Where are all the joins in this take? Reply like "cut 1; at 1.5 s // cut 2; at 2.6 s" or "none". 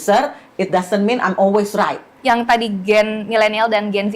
cut 1; at 2.1 s